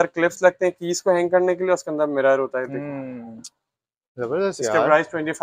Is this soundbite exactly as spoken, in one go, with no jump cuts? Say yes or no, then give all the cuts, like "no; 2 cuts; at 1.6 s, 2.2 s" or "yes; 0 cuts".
yes; 0 cuts